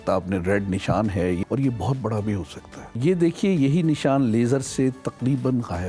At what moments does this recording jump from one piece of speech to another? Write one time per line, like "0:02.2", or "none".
0:01.4
0:02.8